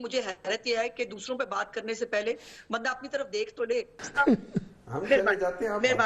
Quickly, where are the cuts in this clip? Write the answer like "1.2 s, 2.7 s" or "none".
4.0 s